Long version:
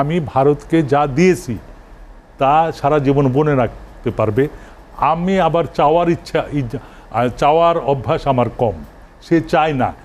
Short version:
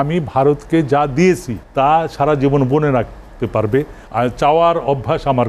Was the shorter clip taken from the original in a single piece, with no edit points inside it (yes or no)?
no